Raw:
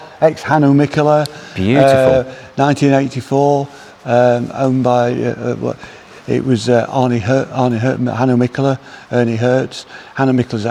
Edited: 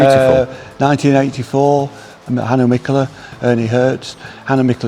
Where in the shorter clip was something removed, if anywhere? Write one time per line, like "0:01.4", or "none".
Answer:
0:02.3